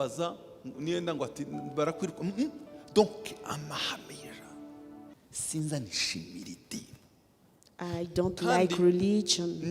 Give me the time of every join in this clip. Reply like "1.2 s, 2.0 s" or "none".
5.1 s